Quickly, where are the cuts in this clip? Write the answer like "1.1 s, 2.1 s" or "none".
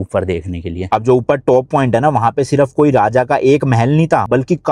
0.9 s